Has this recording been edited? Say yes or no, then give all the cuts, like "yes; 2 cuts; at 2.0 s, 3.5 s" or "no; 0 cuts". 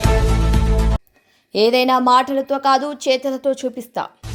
no; 0 cuts